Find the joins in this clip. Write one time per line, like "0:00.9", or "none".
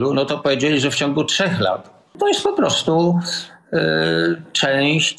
0:02.2